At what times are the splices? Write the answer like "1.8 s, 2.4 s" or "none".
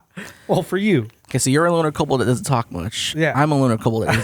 1.2 s